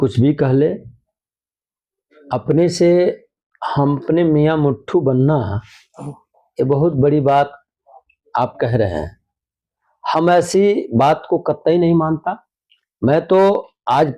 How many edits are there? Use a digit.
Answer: 0